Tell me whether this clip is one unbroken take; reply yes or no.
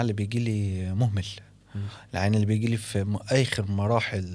yes